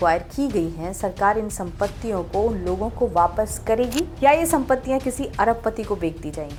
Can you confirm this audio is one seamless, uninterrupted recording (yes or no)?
yes